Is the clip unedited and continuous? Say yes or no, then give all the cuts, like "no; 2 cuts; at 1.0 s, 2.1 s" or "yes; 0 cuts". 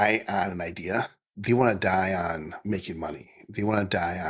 no; 2 cuts; at 1.3 s, 2.5 s